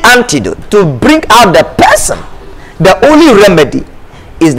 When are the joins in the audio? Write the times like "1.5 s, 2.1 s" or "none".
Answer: none